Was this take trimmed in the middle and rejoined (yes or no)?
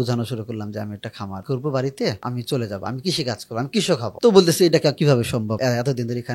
yes